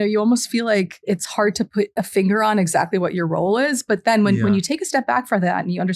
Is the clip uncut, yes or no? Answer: no